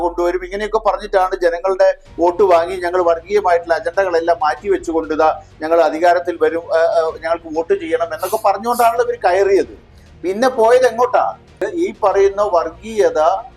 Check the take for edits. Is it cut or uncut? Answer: cut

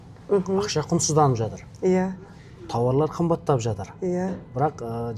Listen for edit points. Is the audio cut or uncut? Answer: uncut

